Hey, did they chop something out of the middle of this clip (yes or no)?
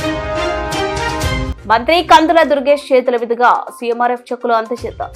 no